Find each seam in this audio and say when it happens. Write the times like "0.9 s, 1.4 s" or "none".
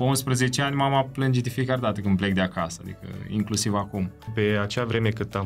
4.3 s